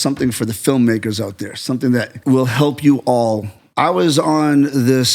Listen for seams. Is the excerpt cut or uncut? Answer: cut